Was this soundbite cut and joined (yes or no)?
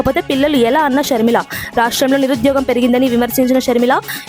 no